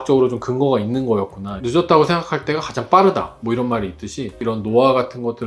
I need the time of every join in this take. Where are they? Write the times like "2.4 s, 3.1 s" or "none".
1.6 s, 4.4 s